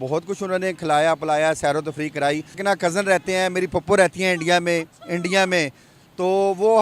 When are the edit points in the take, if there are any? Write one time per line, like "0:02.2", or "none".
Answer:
0:02.6